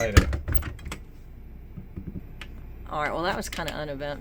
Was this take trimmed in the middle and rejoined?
yes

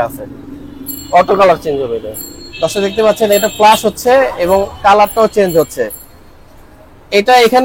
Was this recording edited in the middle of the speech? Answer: no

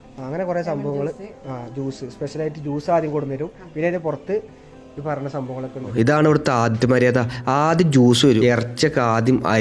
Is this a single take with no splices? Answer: no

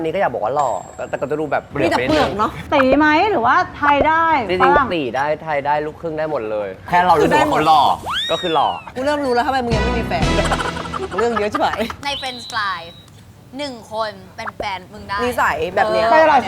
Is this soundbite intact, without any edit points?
no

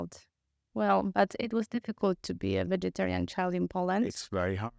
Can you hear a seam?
no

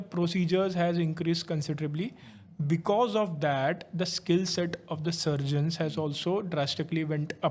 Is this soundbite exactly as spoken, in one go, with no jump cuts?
yes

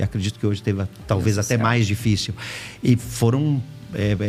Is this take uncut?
yes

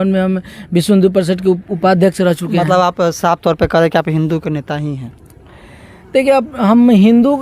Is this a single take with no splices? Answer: yes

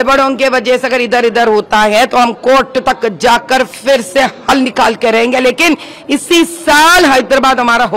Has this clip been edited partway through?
no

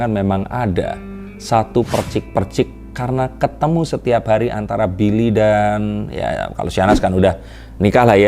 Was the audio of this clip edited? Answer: no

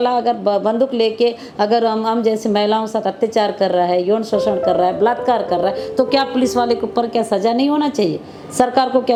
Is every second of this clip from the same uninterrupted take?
yes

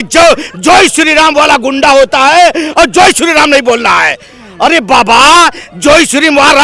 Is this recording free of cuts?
yes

